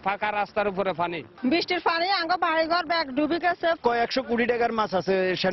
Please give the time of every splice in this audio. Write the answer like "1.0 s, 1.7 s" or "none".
1.3 s, 3.8 s